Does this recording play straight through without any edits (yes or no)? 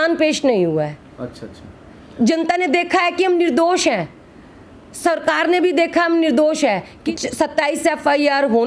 no